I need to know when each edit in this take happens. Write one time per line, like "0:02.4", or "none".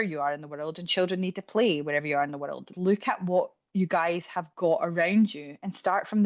0:02.7